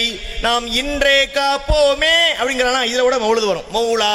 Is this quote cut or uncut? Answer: uncut